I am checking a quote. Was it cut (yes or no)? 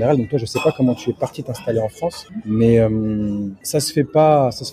yes